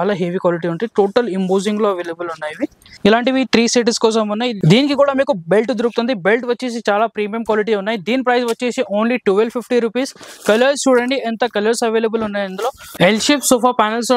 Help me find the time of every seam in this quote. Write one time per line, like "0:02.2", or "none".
0:02.8
0:12.8